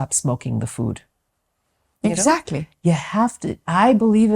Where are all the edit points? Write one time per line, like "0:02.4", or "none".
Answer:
none